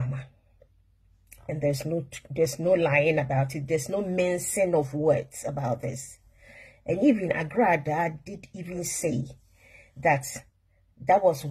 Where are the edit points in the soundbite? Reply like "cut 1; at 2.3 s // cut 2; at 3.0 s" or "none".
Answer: none